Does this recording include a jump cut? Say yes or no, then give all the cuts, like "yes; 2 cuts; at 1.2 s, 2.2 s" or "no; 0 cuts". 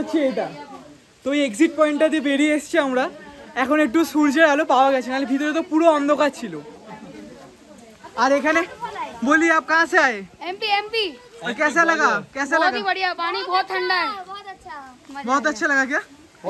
no; 0 cuts